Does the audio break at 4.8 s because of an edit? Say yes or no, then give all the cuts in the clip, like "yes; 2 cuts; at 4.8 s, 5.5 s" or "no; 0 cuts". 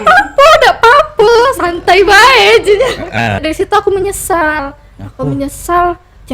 no; 1 cut; at 3.4 s